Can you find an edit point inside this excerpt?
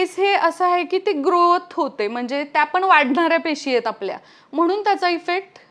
no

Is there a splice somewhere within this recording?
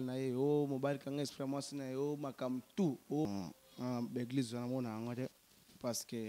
yes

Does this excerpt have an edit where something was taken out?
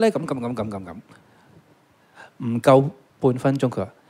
yes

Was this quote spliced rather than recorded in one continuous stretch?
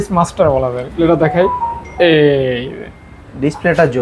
yes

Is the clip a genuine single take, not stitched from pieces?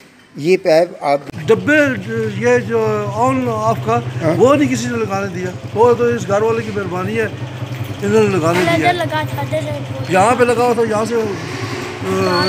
no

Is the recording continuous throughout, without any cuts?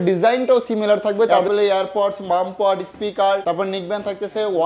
no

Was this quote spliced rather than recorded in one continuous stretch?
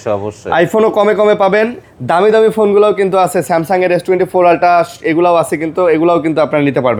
no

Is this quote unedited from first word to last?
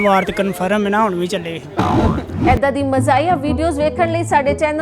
no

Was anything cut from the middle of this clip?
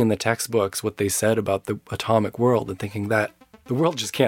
no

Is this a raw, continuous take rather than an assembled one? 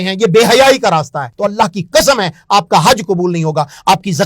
no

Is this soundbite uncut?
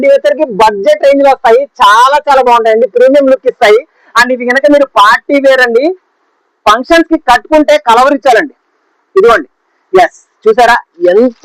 yes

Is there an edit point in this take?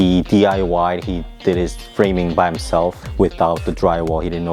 yes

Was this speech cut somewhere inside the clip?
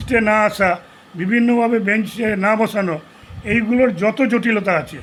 no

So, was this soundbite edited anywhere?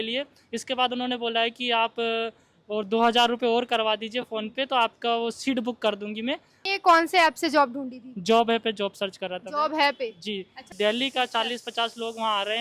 yes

